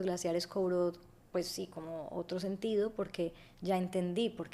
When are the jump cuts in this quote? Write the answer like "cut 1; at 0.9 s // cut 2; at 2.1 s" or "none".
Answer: none